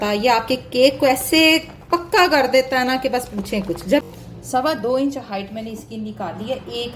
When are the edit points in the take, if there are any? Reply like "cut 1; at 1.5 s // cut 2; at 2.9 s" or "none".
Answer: cut 1; at 4.0 s